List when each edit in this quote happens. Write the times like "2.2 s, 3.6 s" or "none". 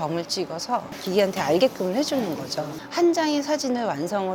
1.0 s, 2.7 s